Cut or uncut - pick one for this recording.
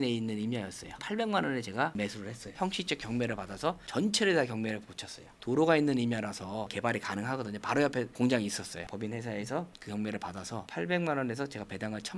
cut